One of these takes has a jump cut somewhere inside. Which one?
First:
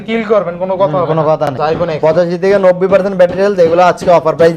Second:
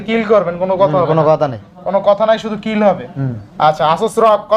first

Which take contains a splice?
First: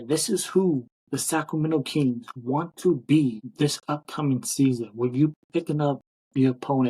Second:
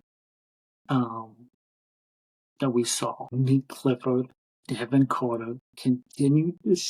second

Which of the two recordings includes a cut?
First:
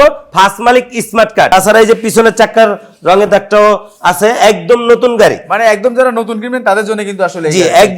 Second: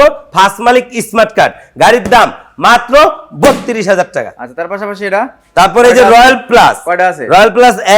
first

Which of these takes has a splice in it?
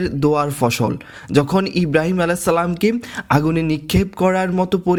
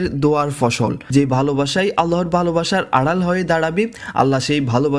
second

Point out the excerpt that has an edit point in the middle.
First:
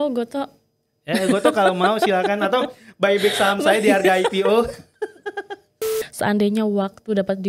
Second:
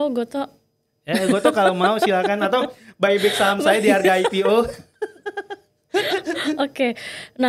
first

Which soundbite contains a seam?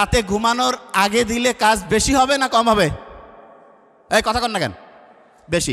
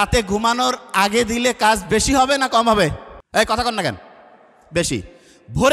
second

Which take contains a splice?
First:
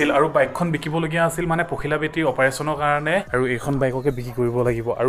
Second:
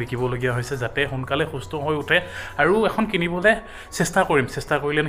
first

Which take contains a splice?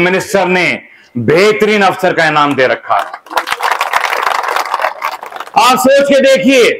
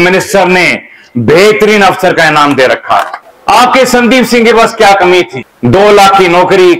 second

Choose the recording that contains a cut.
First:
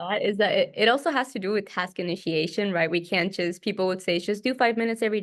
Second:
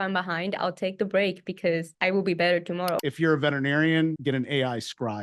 second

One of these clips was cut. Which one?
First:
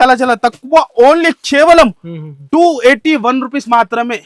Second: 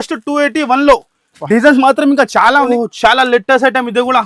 second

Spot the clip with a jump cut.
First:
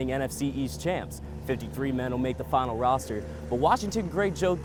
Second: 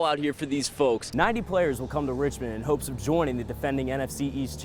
second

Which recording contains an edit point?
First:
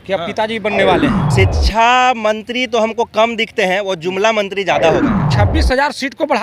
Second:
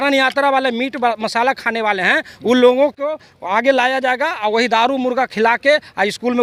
first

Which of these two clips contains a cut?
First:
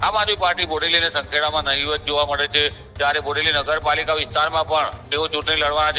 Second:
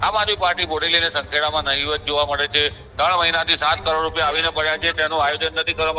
second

